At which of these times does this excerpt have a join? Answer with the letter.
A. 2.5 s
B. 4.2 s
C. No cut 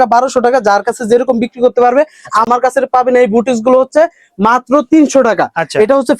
A